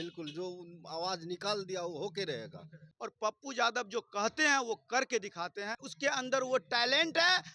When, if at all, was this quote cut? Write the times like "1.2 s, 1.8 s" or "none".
2.8 s, 5.8 s